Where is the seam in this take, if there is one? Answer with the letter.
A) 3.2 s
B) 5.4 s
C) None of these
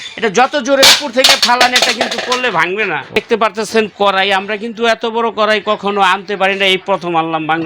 A